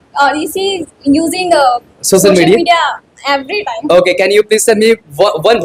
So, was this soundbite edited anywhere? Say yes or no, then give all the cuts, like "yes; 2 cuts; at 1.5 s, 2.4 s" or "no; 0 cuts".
no; 0 cuts